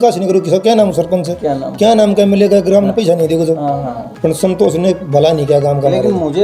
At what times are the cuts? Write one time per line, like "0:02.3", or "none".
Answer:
0:04.0